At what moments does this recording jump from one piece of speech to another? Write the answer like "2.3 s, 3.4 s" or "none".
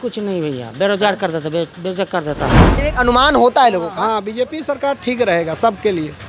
2.7 s